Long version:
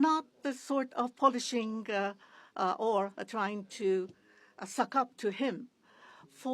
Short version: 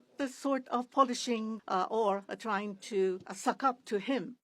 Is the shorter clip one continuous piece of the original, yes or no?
no